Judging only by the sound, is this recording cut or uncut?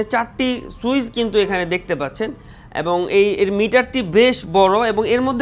uncut